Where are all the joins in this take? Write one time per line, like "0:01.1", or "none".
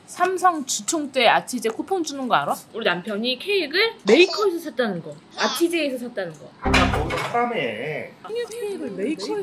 0:02.7